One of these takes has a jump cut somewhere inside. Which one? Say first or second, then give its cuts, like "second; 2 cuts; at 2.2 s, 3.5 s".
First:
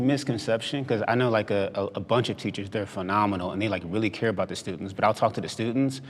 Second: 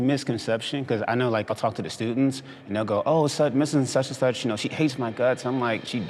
second; 1 cut; at 1.5 s